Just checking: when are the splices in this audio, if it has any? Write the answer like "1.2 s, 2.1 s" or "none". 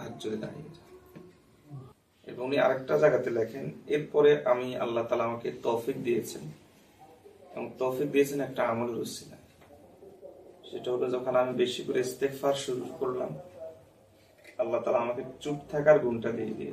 1.9 s

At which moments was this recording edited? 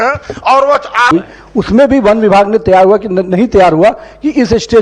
1.1 s

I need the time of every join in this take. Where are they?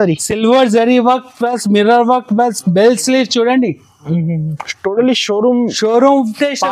none

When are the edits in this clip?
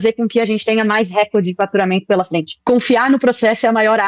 2.6 s

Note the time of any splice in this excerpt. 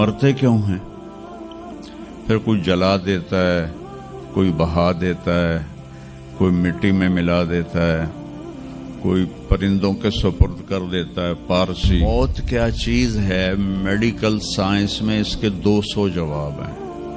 12.0 s

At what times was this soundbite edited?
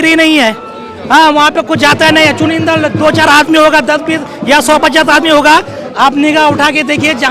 none

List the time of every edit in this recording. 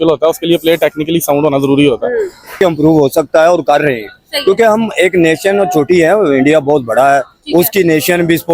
2.6 s

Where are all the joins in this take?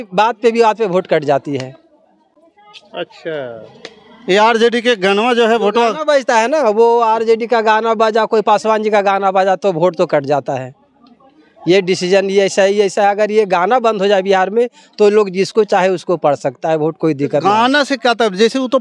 none

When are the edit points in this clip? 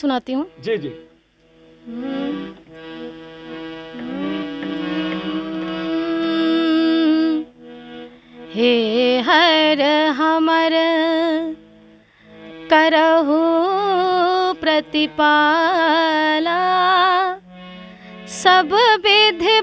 none

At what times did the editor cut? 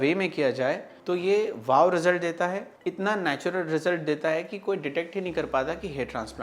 0.9 s, 2.7 s

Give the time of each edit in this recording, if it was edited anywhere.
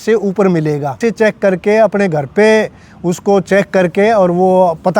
1.0 s

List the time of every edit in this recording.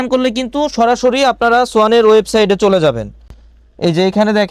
none

